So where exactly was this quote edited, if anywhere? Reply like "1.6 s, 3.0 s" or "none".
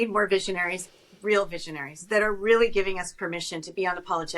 none

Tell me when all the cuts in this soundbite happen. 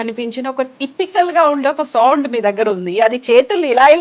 none

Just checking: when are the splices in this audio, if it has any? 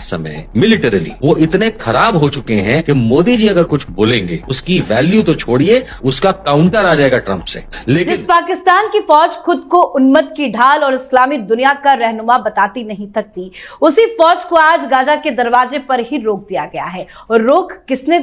8.1 s

